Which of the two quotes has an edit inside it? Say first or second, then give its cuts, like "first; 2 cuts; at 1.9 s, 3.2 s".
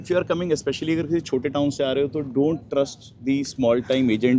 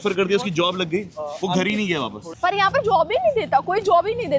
second; 1 cut; at 2.2 s